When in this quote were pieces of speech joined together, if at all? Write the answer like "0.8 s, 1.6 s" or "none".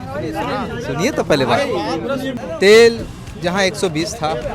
2.4 s